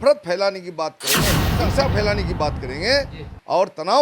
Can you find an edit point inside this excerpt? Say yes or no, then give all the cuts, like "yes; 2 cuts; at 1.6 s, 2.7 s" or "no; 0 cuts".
yes; 1 cut; at 1.4 s